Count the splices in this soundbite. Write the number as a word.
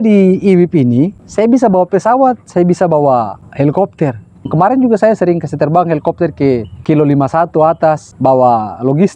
five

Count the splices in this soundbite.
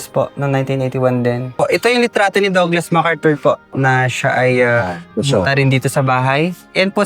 three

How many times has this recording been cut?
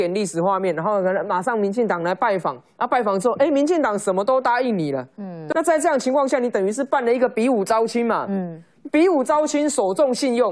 one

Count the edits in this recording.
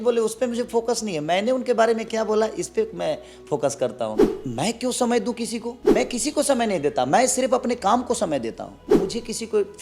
three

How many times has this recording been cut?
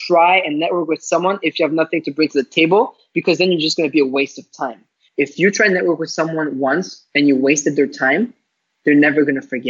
one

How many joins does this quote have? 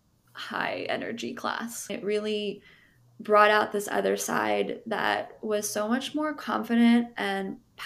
one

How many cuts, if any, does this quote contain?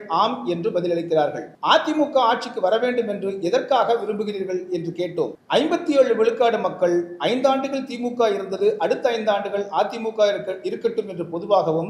two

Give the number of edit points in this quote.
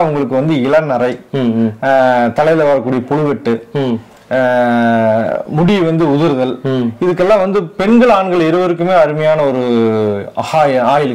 zero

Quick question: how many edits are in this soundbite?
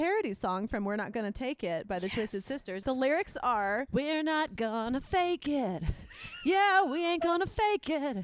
two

